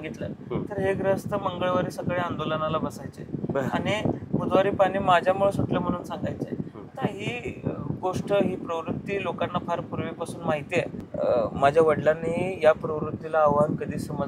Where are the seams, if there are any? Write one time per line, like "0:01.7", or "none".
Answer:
0:11.0